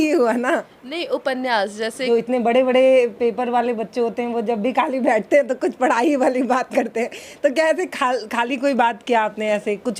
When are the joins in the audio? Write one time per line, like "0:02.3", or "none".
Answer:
0:02.0